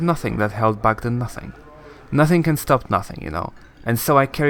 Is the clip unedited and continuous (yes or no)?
yes